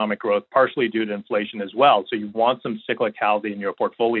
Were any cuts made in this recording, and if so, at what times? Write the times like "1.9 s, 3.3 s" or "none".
none